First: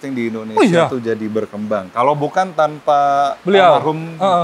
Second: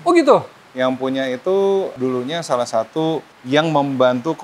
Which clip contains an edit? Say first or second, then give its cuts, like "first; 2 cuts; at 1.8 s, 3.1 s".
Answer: second; 2 cuts; at 1.9 s, 3.3 s